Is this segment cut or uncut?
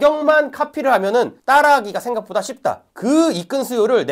uncut